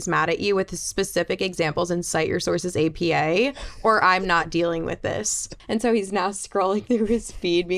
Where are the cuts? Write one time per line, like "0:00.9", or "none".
0:05.5

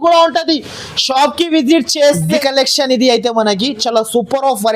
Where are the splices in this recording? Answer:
0:02.3

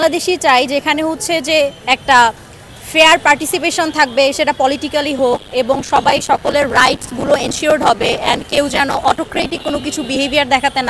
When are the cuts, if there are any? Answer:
none

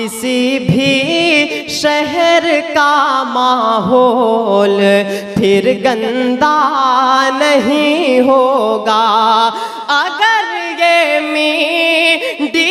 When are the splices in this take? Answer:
none

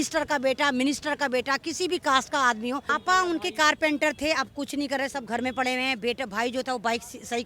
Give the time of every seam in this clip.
0:03.0

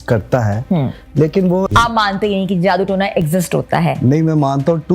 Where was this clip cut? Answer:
0:01.7

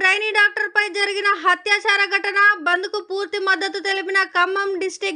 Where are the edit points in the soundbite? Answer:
none

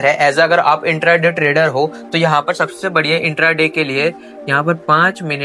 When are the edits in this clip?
none

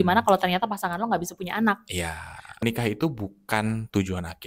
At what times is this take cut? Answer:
0:02.6

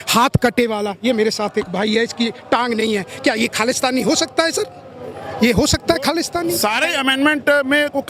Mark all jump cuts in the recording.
0:06.4

